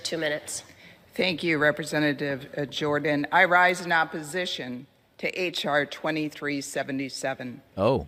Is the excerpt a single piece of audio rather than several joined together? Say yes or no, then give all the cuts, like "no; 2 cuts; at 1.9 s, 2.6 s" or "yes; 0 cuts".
yes; 0 cuts